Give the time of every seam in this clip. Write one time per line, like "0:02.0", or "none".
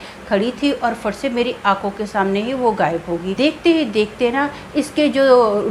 0:03.3